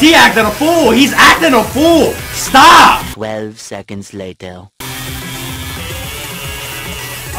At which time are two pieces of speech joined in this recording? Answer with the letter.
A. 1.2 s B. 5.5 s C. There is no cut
C